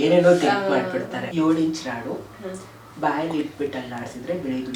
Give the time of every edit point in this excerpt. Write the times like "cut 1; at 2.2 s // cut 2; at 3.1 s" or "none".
cut 1; at 1.2 s

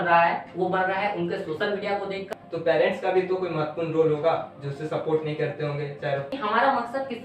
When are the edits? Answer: cut 1; at 2.3 s // cut 2; at 6.3 s

